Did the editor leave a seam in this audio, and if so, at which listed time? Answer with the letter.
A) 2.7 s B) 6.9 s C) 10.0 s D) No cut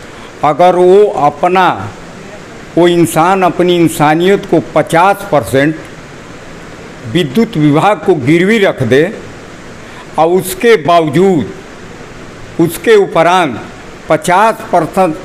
D